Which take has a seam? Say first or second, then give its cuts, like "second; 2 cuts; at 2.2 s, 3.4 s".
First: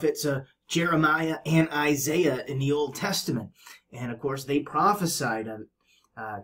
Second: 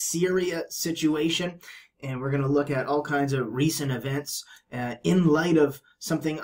second; 1 cut; at 3.7 s